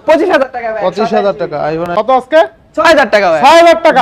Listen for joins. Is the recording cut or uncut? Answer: cut